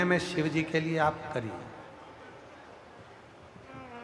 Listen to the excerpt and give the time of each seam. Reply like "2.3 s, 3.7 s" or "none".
none